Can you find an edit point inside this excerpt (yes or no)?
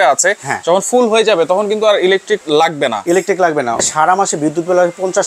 yes